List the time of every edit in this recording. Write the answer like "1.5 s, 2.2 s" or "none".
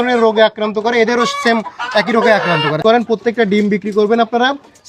2.8 s